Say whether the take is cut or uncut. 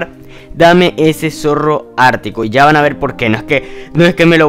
uncut